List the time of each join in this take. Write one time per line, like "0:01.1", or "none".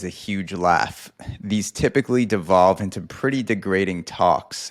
none